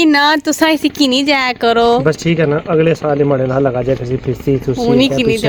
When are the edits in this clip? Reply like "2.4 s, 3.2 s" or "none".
none